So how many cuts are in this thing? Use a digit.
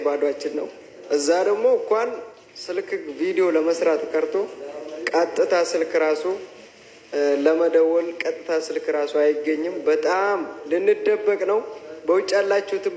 0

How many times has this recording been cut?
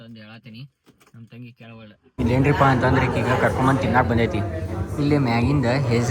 1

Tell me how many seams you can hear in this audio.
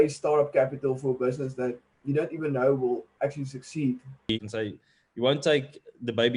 1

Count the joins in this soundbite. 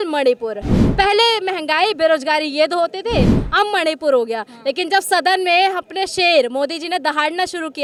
0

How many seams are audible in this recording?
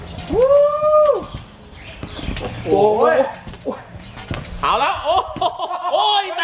0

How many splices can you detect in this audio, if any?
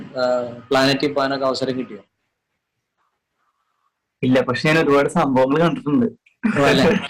0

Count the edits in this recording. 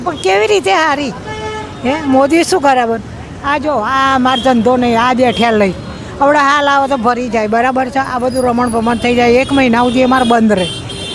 0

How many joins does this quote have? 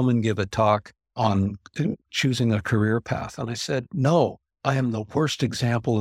0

